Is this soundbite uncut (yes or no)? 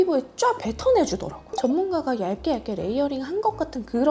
no